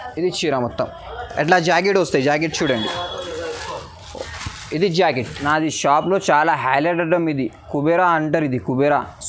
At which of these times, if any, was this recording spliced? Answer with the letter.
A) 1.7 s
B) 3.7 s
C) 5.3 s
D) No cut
C